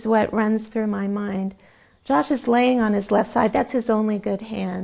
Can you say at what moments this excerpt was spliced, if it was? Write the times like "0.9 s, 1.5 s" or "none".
none